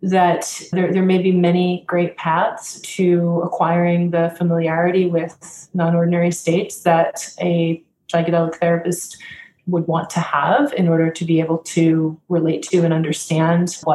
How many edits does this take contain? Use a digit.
0